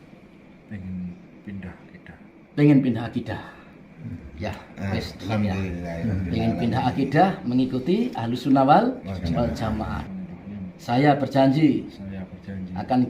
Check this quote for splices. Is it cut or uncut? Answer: cut